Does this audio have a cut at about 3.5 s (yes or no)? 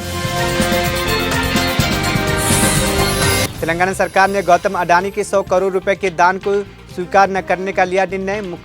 yes